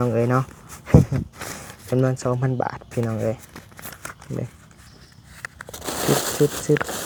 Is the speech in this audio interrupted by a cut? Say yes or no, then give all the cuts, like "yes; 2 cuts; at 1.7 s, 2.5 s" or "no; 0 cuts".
no; 0 cuts